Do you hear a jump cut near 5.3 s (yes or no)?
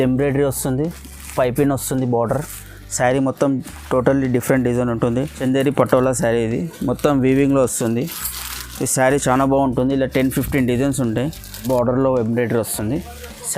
yes